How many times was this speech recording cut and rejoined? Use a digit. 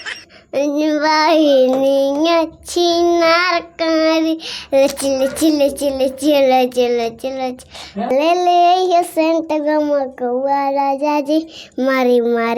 1